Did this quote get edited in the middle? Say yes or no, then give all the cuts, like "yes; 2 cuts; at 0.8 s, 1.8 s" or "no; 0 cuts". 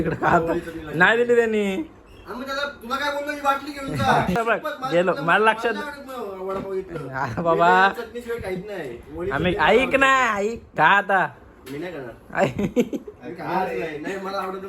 yes; 2 cuts; at 4.3 s, 10.6 s